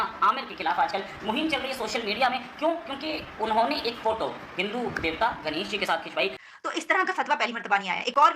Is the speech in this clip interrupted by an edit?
yes; 1 cut; at 6.4 s

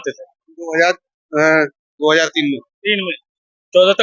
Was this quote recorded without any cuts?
yes; 0 cuts

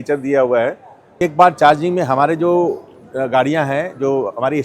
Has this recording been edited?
yes; 1 cut; at 1.1 s

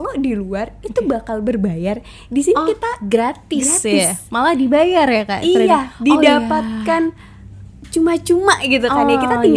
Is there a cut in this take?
no; 0 cuts

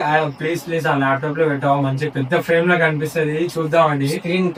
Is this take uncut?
yes; 0 cuts

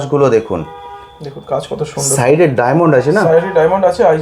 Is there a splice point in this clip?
no; 0 cuts

